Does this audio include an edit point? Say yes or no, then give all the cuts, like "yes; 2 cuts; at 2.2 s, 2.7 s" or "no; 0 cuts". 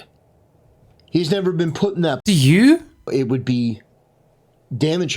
yes; 1 cut; at 3.1 s